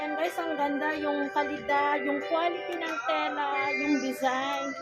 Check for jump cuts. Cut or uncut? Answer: uncut